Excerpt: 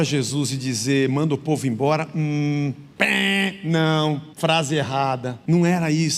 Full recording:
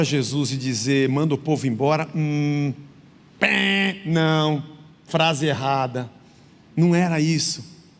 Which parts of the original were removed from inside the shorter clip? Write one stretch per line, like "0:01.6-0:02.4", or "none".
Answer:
0:02.8-0:03.2
0:04.7-0:05.0
0:06.0-0:06.6